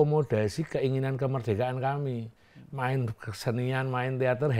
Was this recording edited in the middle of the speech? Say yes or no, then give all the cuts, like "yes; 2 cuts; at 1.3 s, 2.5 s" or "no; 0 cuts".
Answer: no; 0 cuts